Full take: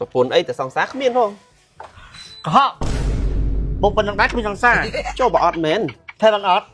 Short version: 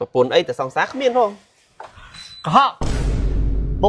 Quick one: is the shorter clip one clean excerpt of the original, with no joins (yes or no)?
yes